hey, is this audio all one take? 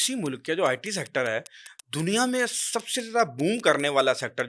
yes; 0 cuts

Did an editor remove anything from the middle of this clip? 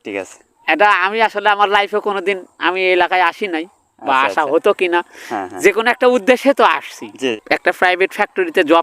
yes; 1 cut; at 7.4 s

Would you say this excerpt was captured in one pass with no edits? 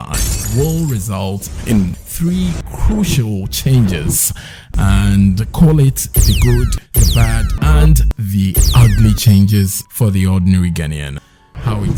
yes; 0 cuts

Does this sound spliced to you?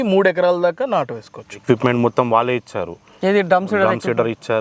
yes; 1 cut; at 1.6 s

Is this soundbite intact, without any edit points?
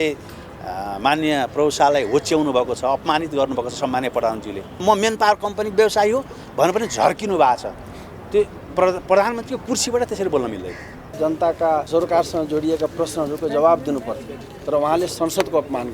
no; 3 cuts; at 4.8 s, 11.1 s, 11.9 s

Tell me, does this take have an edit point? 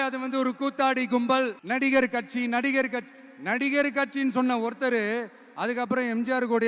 yes; 1 cut; at 1.6 s

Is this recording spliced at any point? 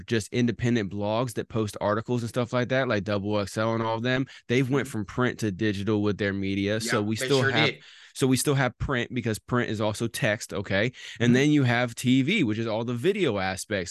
no; 0 cuts

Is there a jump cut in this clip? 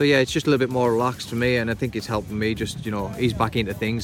no; 0 cuts

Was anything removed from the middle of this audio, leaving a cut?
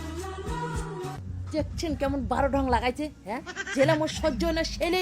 yes; 1 cut; at 1.2 s

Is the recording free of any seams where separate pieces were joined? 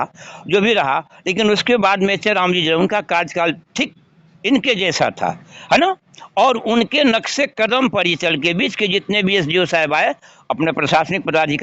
yes; 0 cuts

